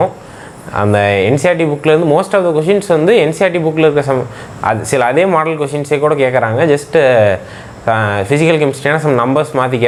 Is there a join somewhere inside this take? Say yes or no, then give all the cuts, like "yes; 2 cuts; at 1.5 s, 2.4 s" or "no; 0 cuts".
no; 0 cuts